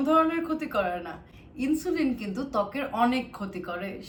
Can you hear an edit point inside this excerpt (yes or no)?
no